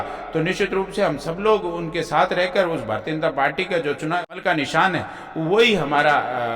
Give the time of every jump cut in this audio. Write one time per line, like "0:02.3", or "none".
0:04.4